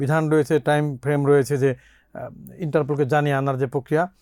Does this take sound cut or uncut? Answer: uncut